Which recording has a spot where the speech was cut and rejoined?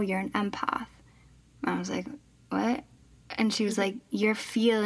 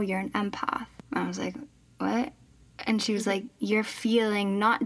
second; 1 cut; at 0.9 s

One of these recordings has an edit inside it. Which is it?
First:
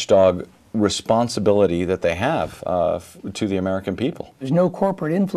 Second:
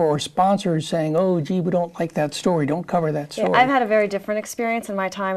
first; 1 cut; at 4.4 s

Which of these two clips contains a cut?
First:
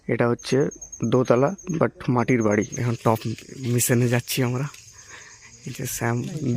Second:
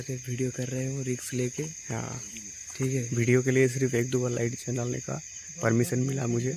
first; 1 cut; at 2.8 s

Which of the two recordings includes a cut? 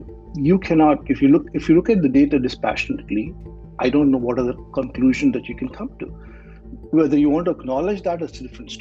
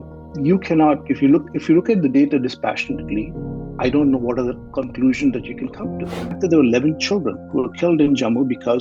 second; 1 cut; at 6.3 s

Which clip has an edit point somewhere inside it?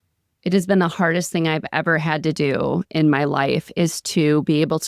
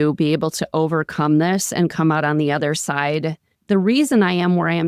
second; 1 cut; at 3.5 s

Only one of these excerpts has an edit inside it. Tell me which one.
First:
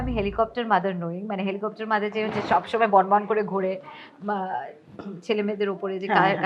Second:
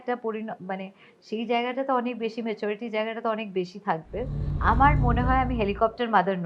second; 1 cut; at 4.5 s

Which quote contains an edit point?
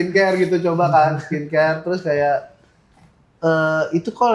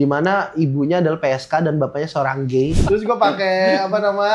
second; 1 cut; at 2.8 s

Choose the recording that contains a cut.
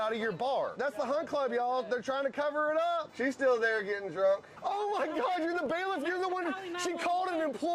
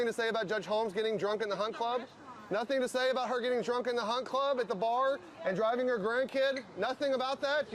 first; 3 cuts; at 0.8 s, 3.1 s, 4.5 s

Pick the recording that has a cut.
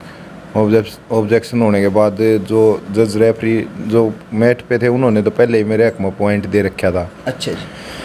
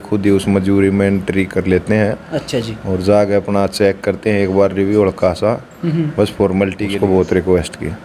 second; 1 cut; at 6.8 s

